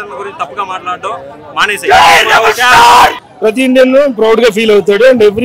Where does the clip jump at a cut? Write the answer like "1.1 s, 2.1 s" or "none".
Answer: 3.2 s